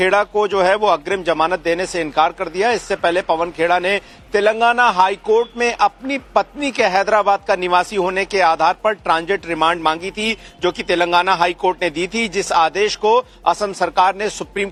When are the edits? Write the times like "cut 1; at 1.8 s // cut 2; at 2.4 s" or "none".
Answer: none